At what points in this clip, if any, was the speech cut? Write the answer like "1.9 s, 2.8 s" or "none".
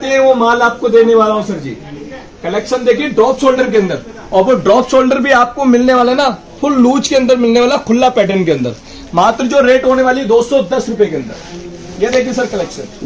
none